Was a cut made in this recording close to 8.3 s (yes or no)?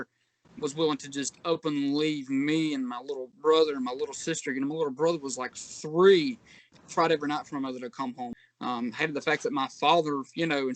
yes